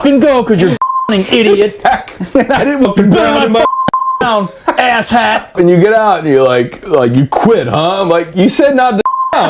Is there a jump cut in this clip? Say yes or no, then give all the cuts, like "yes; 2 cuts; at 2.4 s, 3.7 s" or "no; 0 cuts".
yes; 2 cuts; at 2.9 s, 5.5 s